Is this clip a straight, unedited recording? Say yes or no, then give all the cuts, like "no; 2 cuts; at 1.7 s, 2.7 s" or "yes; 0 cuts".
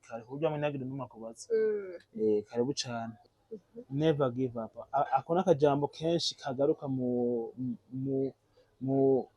no; 1 cut; at 3.2 s